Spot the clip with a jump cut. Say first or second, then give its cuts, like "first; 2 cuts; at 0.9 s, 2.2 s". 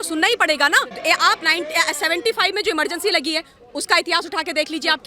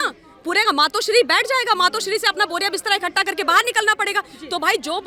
first; 1 cut; at 0.9 s